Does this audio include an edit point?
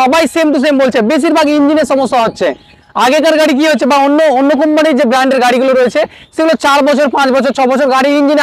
no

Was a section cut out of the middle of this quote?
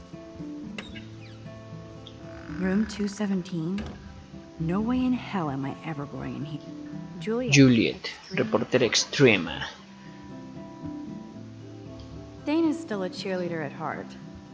no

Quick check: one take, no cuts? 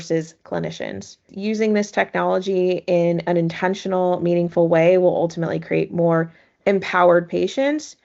no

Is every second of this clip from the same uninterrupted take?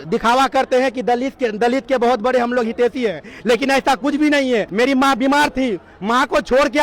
no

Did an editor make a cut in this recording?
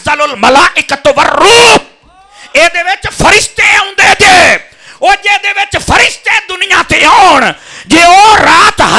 no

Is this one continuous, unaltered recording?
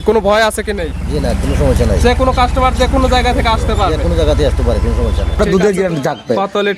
no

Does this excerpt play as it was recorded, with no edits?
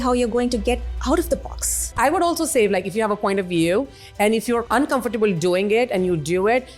no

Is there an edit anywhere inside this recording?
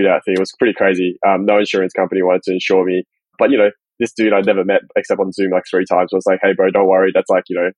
no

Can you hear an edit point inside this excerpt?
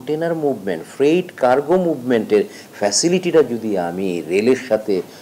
no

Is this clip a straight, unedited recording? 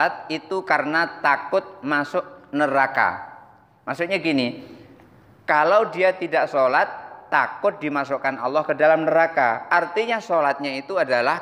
yes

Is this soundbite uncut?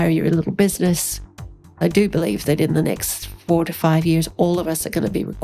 no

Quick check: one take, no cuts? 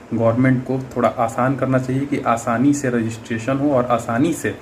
yes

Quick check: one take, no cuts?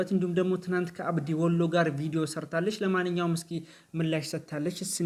yes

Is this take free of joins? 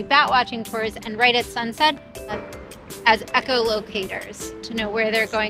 no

